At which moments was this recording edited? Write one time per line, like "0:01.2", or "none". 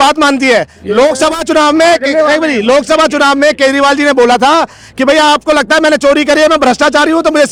none